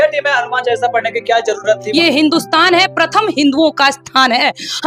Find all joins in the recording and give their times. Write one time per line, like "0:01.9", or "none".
0:01.8